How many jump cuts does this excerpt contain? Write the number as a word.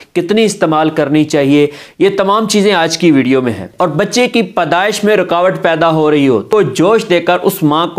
two